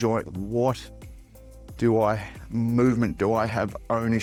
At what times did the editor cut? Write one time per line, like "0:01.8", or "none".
none